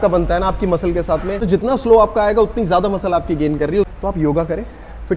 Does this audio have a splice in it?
yes; 2 cuts; at 1.4 s, 3.9 s

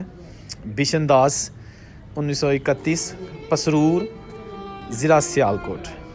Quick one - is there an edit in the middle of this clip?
no; 0 cuts

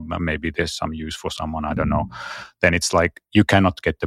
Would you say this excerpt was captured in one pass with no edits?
yes; 0 cuts

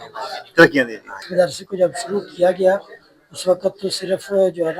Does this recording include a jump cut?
yes; 1 cut; at 1.2 s

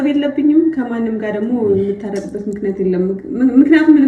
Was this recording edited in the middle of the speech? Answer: no; 0 cuts

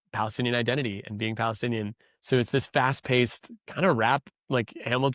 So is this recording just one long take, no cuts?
yes; 0 cuts

